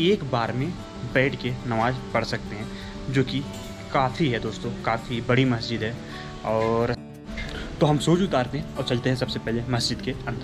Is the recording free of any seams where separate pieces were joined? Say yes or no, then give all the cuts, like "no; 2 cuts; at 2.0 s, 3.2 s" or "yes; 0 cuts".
yes; 0 cuts